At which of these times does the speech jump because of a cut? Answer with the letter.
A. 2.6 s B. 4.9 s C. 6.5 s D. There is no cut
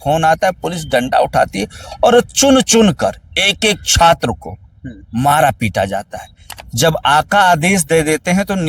C